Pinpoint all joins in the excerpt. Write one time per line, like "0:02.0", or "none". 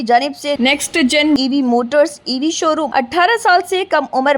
0:02.9

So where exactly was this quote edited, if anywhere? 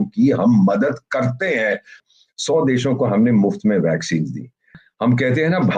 0:01.9
0:04.8

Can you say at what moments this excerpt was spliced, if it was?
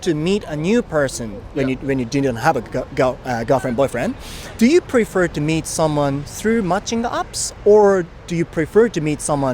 none

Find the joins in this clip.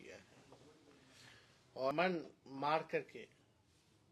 0:01.9

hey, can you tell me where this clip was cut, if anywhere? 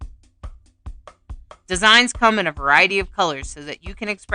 0:01.6

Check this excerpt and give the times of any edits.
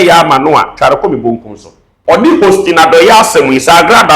0:02.2

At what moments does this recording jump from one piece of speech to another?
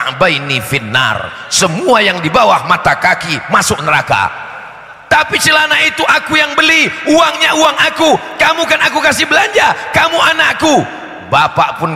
none

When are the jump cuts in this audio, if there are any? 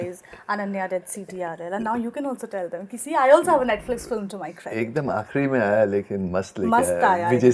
none

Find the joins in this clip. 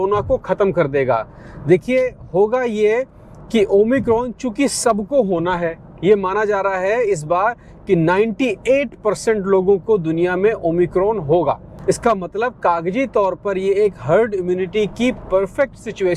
none

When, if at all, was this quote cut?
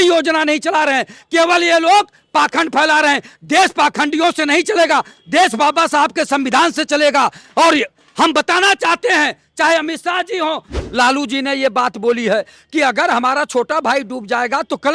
0:10.8

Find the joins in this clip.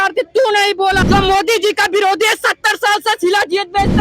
0:01.0

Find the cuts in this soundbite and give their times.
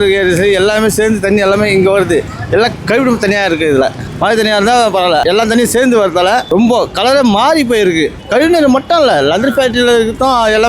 0:04.1
0:05.2
0:06.4
0:08.2

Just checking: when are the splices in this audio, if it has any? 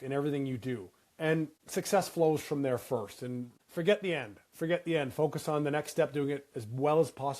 0:01.5
0:03.6

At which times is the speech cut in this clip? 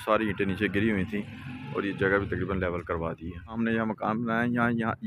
0:03.6

